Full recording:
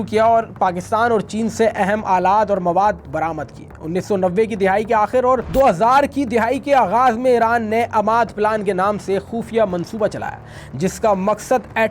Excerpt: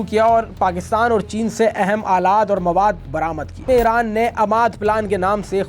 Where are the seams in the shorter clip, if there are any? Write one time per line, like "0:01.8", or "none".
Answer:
0:03.6